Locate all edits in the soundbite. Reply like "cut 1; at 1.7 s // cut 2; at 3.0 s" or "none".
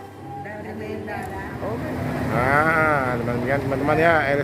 cut 1; at 1.5 s